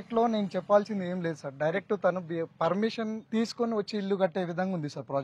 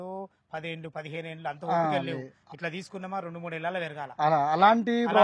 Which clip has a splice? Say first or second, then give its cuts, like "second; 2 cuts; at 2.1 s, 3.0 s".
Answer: first; 1 cut; at 3.2 s